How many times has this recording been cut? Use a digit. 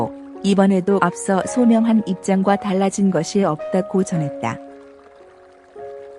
1